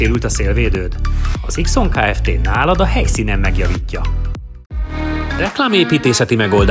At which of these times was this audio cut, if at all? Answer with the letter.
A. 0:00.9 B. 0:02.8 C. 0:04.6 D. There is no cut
C